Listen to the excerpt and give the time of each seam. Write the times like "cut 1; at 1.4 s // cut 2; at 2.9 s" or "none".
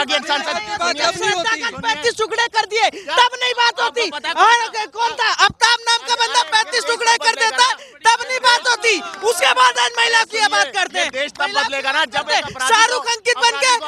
none